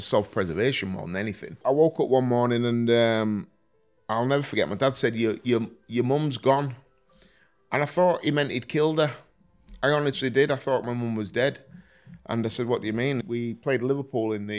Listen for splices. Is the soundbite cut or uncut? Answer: cut